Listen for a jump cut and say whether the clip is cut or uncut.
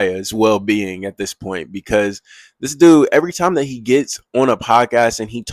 uncut